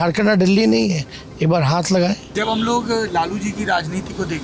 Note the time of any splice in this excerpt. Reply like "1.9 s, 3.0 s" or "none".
2.3 s